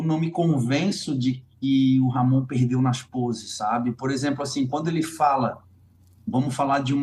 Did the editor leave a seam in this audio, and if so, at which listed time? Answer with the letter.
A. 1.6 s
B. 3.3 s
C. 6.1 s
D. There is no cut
D